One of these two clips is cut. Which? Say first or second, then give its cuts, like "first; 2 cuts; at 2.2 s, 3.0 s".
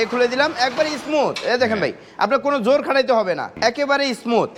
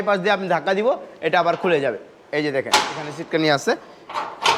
first; 1 cut; at 3.5 s